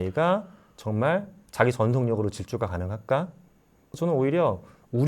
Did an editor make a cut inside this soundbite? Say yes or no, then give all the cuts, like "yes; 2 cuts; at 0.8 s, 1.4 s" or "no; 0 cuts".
yes; 1 cut; at 3.8 s